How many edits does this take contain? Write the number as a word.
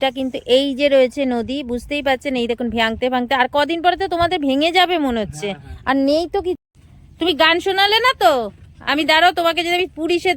one